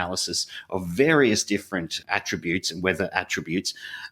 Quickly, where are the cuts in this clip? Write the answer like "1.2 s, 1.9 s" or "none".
none